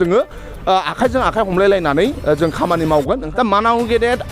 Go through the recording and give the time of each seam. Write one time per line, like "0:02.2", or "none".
0:03.2

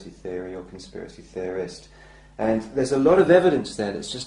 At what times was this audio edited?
0:02.8

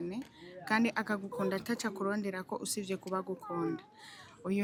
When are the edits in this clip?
none

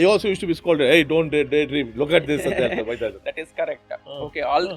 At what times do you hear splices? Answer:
0:03.2

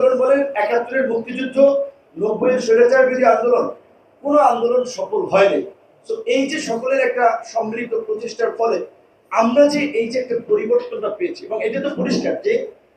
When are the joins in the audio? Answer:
none

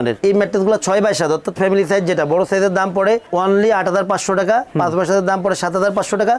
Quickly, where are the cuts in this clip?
none

